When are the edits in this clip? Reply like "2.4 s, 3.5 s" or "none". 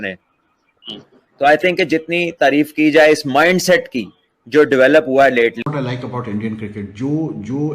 5.6 s